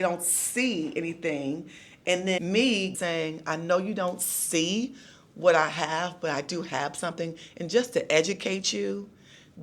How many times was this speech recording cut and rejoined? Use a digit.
1